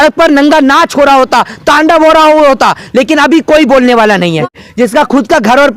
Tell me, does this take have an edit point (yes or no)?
yes